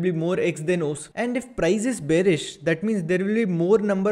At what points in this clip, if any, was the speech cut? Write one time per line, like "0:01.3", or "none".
0:01.1